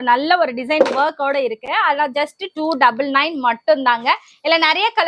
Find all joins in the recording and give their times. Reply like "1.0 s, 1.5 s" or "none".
none